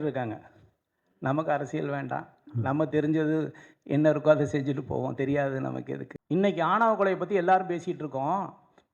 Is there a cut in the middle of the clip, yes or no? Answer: yes